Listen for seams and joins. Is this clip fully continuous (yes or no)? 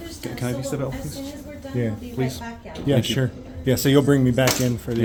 yes